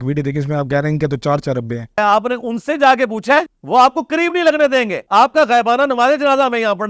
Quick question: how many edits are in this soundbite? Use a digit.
3